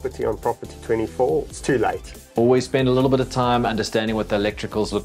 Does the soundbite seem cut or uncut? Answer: cut